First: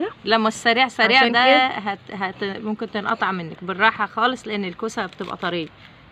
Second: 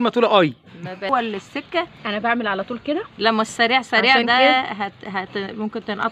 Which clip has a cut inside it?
second; 1 cut; at 1.1 s

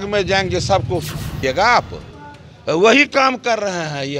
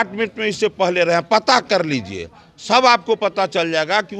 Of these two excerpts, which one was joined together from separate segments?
first; 1 cut; at 1.4 s

